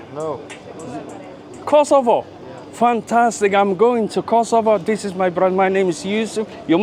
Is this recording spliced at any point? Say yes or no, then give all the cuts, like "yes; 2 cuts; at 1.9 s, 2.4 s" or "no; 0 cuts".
no; 0 cuts